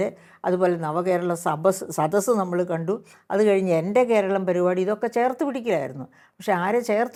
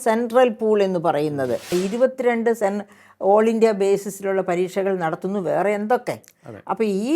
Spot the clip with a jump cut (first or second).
second